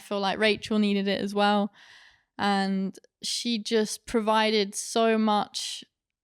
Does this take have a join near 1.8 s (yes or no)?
no